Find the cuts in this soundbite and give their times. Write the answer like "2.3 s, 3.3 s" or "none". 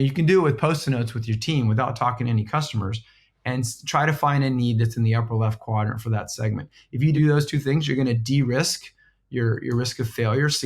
7.2 s

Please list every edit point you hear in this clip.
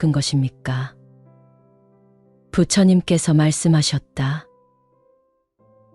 0.9 s, 2.5 s

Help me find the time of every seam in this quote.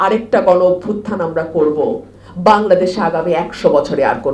none

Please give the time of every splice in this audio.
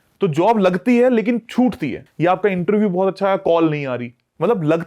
2.0 s

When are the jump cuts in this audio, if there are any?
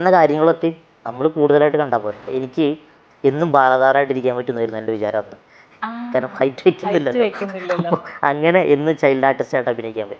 2.3 s

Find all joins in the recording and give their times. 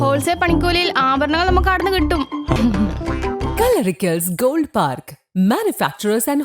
2.6 s

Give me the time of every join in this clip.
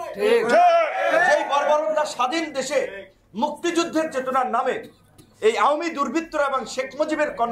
none

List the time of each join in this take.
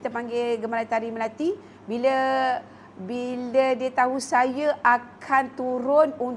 none

